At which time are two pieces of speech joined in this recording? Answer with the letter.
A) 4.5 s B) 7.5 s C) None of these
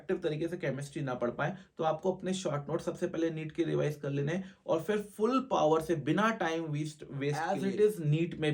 B